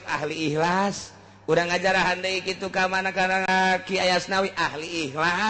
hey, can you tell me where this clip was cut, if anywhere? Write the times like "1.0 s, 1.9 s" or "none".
3.5 s